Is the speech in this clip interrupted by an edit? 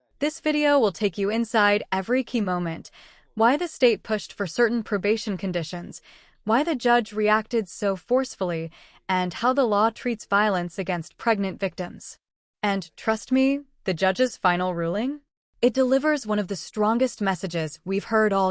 no; 0 cuts

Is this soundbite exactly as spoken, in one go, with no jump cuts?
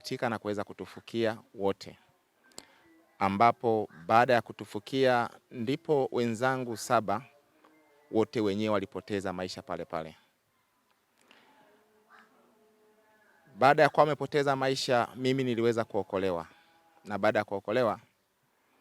yes; 0 cuts

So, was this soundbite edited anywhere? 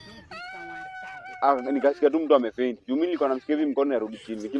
no; 0 cuts

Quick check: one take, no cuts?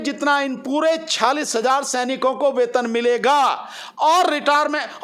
no; 1 cut; at 1.0 s

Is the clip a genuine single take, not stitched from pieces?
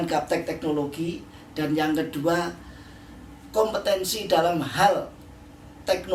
yes; 0 cuts

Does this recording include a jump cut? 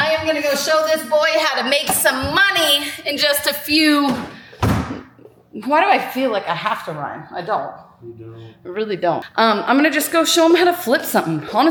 no; 0 cuts

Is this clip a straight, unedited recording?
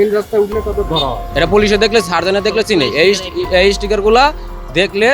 no; 1 cut; at 1.2 s

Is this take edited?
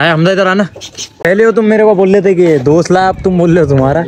yes; 1 cut; at 1.1 s

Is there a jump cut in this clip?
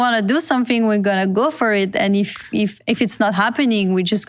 no; 0 cuts

